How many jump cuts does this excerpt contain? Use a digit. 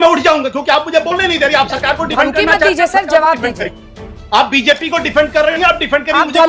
0